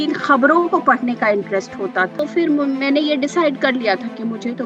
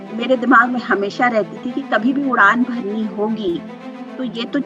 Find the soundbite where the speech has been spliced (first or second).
first